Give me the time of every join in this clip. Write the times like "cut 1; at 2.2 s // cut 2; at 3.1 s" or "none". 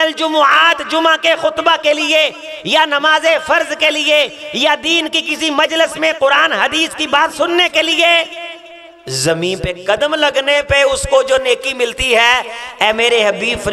none